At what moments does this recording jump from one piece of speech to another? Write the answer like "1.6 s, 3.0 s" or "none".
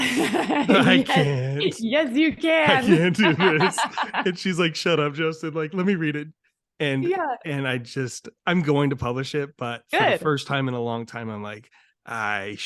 none

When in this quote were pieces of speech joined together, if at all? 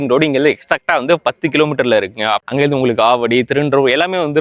2.4 s

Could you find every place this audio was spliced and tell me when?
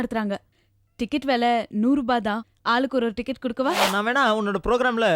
3.8 s

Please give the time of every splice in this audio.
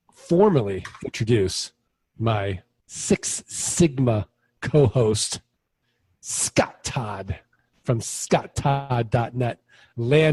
none

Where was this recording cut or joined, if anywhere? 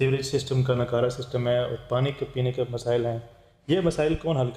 none

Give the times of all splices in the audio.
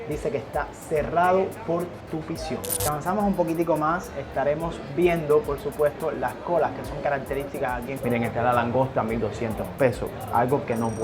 2.8 s, 7.8 s

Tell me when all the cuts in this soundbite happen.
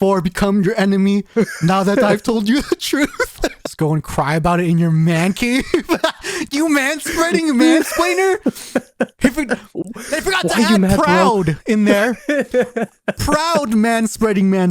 3.6 s

